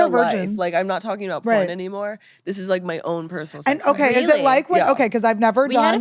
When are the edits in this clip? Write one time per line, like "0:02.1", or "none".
none